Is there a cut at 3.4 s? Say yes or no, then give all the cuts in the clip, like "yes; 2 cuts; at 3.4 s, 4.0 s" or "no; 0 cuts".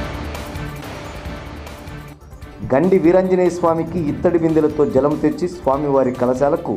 no; 1 cut; at 1.5 s